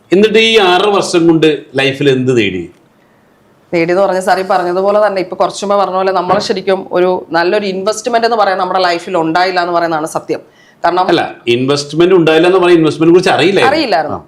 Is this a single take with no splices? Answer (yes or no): yes